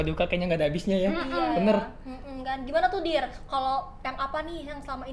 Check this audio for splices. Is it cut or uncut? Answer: uncut